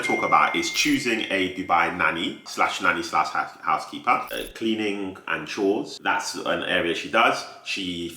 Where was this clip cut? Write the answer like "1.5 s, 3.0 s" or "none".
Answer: 4.3 s, 5.9 s

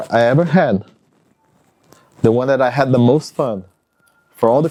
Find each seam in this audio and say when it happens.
none

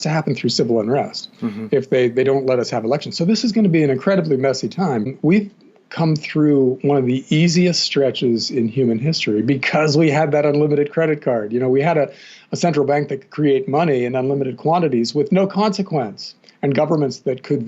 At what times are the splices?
5.1 s

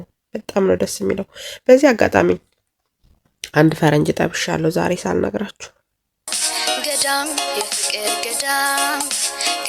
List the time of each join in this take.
6.4 s

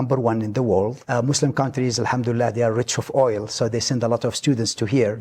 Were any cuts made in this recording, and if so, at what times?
1.1 s

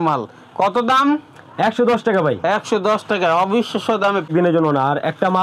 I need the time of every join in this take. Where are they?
4.3 s

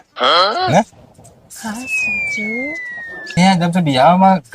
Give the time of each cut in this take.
3.3 s

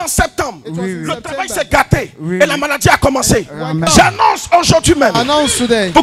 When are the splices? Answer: 3.9 s

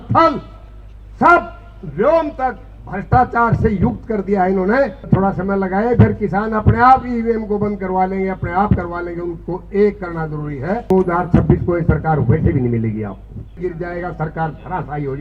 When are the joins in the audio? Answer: 5.1 s, 10.8 s, 13.6 s

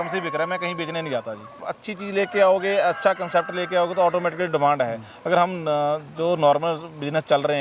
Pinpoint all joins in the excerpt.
1.6 s

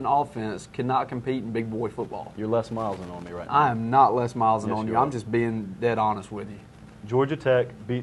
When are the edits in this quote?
none

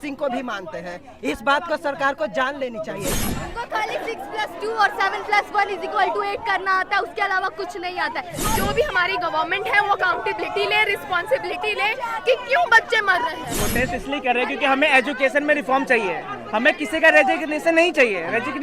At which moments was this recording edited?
3.2 s, 8.4 s, 13.6 s

